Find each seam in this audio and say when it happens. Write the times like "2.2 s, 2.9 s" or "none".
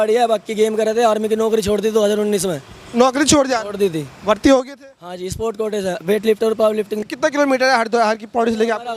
7.0 s